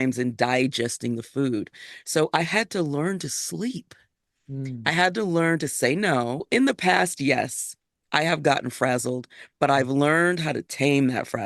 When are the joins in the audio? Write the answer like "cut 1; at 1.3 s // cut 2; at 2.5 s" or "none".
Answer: cut 1; at 6.5 s